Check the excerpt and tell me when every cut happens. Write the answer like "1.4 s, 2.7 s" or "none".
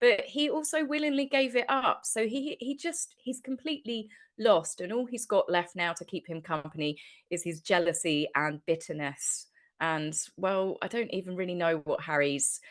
none

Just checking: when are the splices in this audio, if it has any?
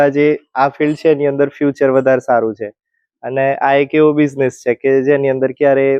none

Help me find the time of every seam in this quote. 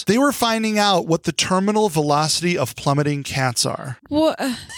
none

